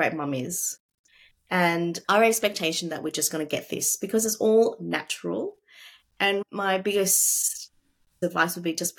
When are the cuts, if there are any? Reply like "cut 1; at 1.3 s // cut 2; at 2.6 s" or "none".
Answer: cut 1; at 2.0 s